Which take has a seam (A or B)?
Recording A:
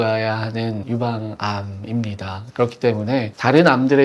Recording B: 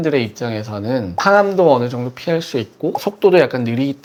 A